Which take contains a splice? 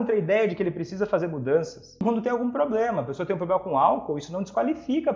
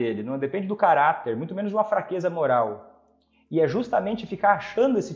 first; 1 cut; at 2.0 s

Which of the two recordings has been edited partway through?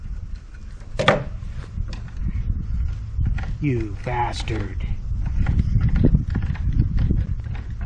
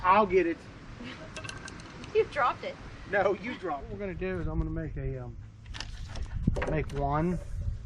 second; 1 cut; at 3.9 s

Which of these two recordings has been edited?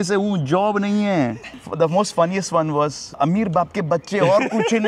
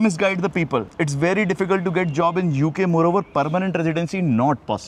first; 2 cuts; at 1.4 s, 3.1 s

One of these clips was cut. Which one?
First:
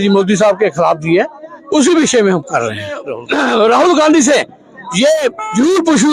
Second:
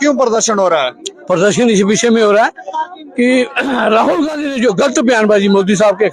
first; 1 cut; at 3.1 s

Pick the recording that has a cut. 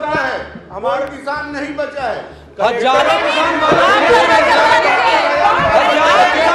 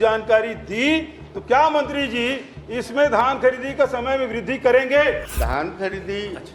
second; 1 cut; at 5.2 s

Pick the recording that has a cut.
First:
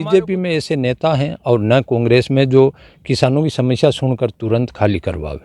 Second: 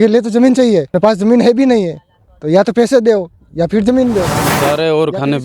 second; 2 cuts; at 0.9 s, 4.4 s

